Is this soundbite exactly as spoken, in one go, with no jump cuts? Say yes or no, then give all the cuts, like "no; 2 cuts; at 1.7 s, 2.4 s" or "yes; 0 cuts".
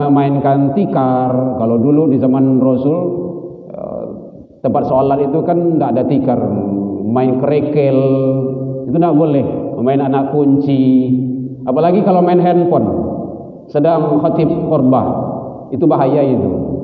yes; 0 cuts